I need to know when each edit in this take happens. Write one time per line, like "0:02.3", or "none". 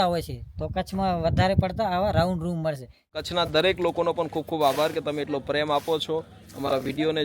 0:03.2